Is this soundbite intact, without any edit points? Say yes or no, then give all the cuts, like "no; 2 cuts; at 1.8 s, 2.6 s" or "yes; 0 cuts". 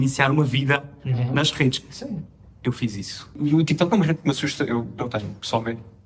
no; 1 cut; at 3.4 s